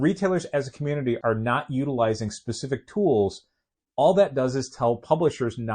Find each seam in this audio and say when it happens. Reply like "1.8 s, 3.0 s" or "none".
1.2 s

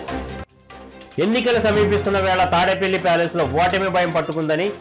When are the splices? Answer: 0.9 s

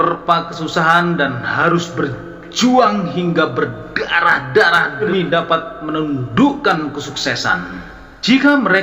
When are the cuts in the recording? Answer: none

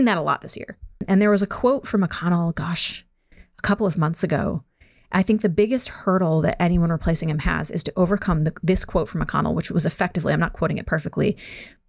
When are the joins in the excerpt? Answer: 1.0 s

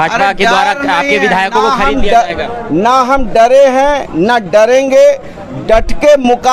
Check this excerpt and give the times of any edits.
none

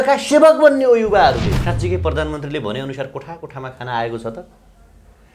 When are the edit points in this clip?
1.6 s

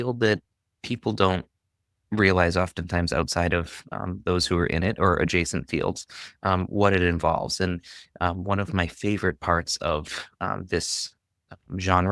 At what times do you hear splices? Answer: none

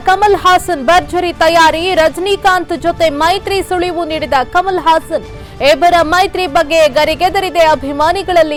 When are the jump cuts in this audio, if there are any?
none

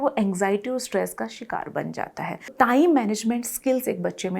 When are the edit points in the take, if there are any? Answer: 2.5 s

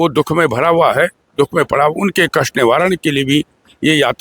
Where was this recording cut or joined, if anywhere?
none

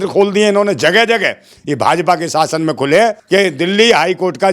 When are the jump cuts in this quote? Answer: 3.2 s

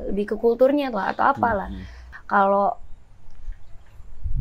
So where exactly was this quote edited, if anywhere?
2.1 s

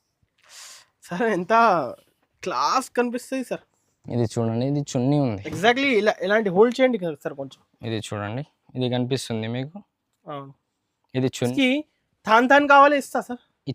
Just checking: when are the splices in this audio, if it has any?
11.5 s

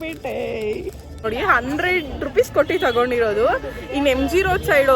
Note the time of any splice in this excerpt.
1.2 s

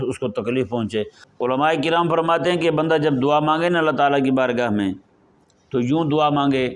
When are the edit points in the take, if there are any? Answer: 1.2 s

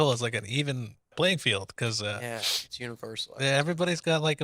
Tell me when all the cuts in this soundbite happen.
1.1 s

